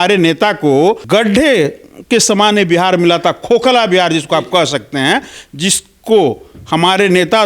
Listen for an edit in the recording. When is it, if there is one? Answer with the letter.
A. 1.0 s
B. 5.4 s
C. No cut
A